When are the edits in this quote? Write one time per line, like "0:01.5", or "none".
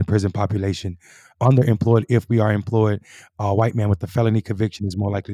none